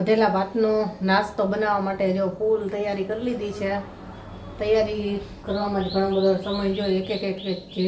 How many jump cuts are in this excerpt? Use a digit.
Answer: 0